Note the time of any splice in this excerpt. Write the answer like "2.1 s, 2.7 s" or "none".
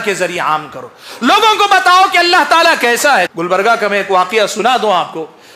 3.3 s